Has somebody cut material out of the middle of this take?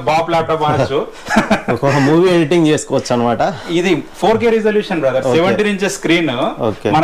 no; 0 cuts

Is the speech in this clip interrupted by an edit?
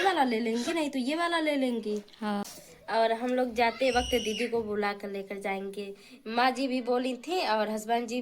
yes; 1 cut; at 2.4 s

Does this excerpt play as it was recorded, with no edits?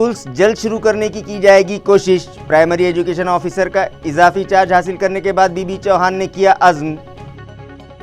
yes; 0 cuts

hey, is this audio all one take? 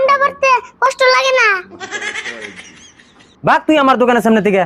no; 1 cut; at 3.2 s

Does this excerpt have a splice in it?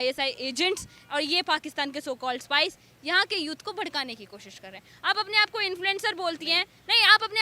no; 0 cuts

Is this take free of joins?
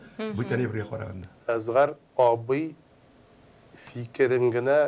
no; 1 cut; at 1.4 s

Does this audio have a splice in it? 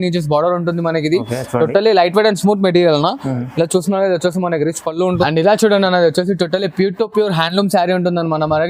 yes; 1 cut; at 5.2 s

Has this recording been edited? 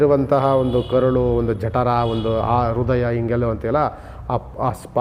no; 0 cuts

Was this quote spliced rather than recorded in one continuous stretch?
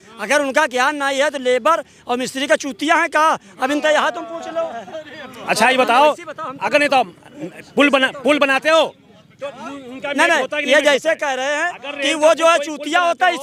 no; 0 cuts

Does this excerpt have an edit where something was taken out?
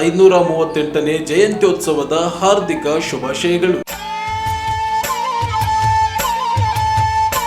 yes; 1 cut; at 3.8 s

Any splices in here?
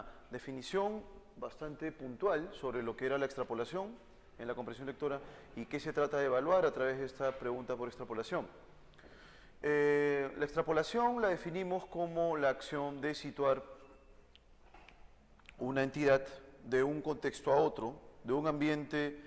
yes; 1 cut; at 12.4 s

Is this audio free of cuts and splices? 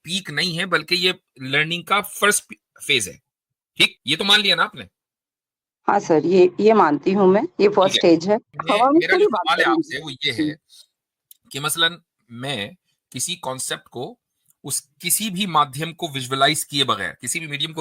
no; 2 cuts; at 4.0 s, 8.6 s

